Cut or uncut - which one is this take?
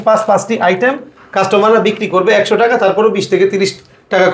uncut